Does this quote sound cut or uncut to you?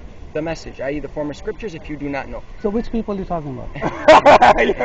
uncut